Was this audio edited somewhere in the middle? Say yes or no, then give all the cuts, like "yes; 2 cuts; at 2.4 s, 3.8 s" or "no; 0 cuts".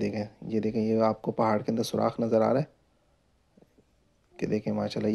no; 0 cuts